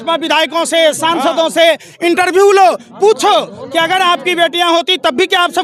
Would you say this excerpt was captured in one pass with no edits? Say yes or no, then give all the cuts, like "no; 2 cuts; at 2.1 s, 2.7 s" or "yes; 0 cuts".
yes; 0 cuts